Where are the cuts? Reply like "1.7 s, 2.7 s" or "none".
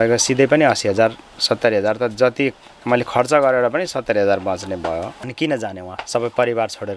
5.2 s